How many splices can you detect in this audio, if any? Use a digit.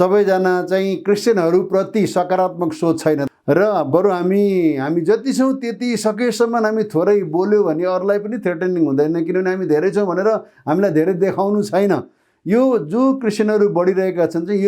1